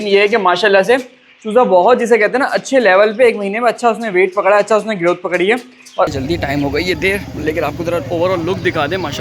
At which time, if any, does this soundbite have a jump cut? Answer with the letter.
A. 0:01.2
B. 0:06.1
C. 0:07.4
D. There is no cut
B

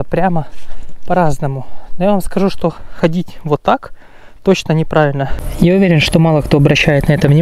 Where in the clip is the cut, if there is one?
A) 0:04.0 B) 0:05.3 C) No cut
B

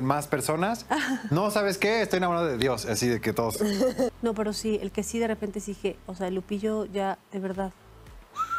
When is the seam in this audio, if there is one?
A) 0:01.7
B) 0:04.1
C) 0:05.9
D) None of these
B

